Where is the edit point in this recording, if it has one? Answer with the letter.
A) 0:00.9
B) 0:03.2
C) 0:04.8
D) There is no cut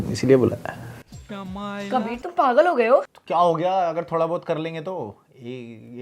B